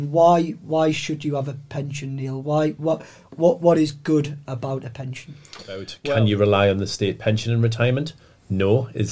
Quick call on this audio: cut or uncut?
cut